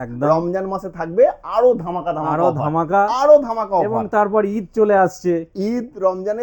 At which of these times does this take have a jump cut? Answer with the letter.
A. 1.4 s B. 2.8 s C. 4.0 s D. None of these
D